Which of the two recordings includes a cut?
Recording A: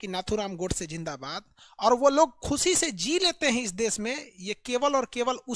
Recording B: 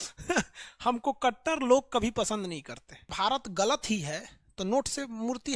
B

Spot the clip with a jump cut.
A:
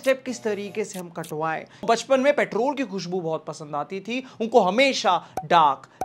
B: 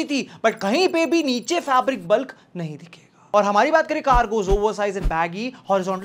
A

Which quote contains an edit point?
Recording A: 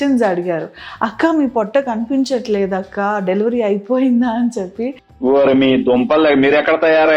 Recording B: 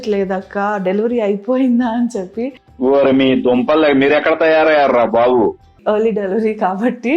B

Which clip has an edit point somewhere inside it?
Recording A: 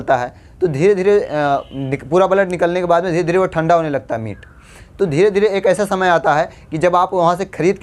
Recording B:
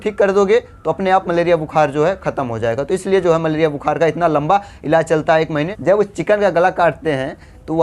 B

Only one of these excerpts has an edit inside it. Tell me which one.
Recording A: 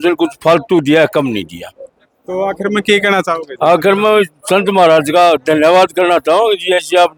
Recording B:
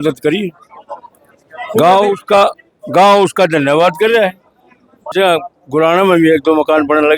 B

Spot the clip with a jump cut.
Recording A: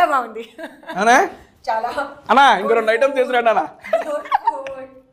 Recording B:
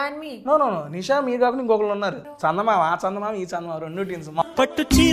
B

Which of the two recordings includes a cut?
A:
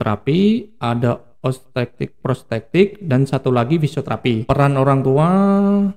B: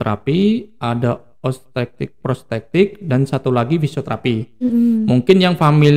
A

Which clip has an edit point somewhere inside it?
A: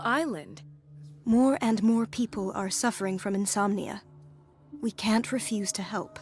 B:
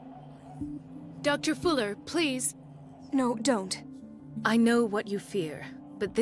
B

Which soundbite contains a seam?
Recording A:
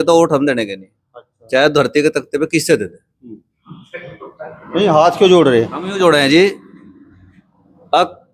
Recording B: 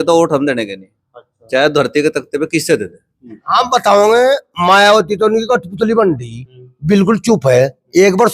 B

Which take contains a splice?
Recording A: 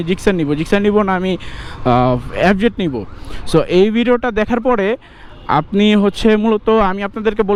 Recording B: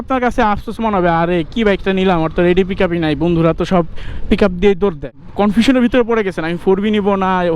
B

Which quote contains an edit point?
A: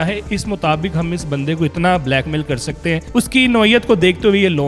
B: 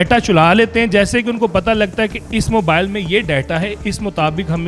A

